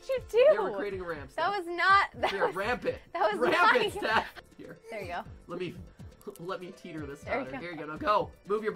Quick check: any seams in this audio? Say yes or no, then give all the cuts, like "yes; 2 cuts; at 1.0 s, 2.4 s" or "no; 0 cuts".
yes; 1 cut; at 4.3 s